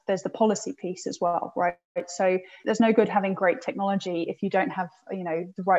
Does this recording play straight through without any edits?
no; 1 cut; at 2.6 s

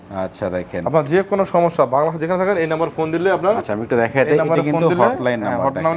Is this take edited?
no; 0 cuts

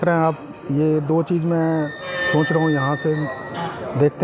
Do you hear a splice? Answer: no; 0 cuts

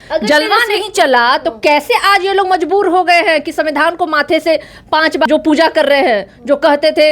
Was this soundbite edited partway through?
yes; 1 cut; at 5.3 s

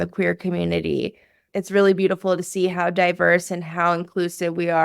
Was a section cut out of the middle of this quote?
yes; 1 cut; at 1.5 s

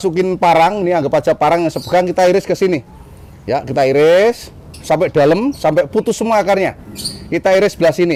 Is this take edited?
no; 0 cuts

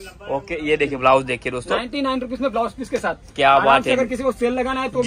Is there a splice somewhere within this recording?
no; 0 cuts

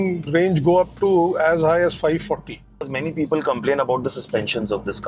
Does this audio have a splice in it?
yes; 1 cut; at 3.0 s

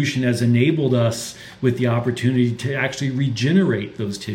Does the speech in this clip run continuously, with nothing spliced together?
yes; 0 cuts

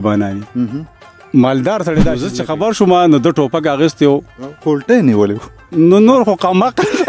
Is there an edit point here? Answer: yes; 1 cut; at 2.3 s

